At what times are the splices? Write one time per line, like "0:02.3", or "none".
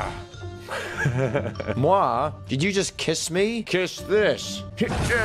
0:01.7